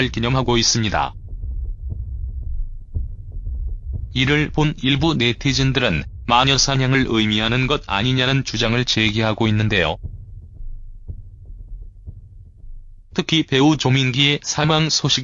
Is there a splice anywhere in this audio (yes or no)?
yes